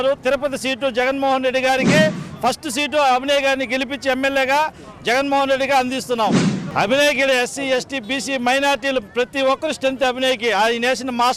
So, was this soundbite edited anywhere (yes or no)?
no